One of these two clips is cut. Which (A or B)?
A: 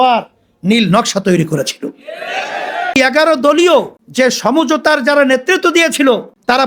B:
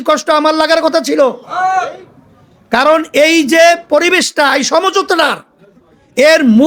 A